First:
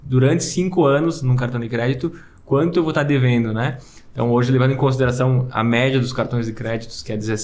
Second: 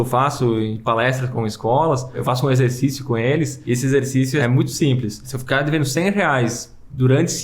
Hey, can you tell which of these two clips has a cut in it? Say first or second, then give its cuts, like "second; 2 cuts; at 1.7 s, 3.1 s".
second; 5 cuts; at 1.3 s, 2.2 s, 3.6 s, 4.4 s, 5.3 s